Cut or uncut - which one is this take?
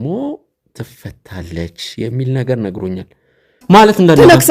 cut